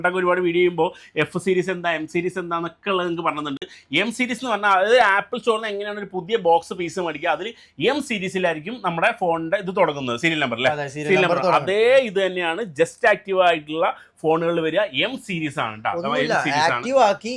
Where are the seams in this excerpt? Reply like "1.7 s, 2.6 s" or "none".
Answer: none